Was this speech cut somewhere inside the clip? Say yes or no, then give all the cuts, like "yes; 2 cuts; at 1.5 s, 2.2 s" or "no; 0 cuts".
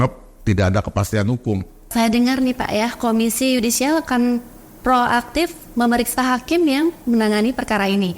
no; 0 cuts